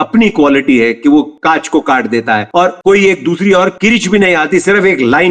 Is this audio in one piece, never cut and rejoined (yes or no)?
yes